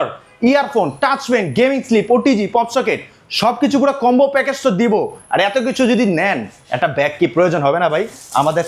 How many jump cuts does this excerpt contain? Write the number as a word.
zero